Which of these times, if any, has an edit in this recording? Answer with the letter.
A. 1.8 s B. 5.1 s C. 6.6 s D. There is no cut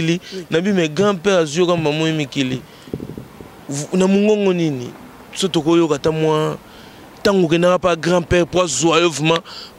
D